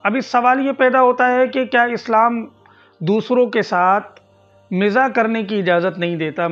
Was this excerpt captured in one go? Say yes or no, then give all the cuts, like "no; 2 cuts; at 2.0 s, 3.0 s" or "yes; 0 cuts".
yes; 0 cuts